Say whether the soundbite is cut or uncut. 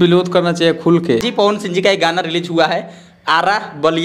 cut